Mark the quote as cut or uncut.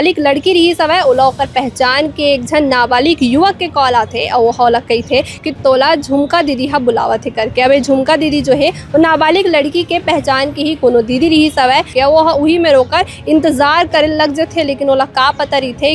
cut